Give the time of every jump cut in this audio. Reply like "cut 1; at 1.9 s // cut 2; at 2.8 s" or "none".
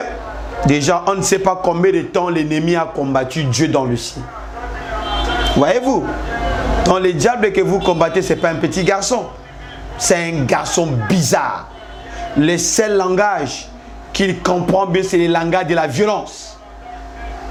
none